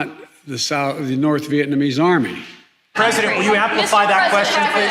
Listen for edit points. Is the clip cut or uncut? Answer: cut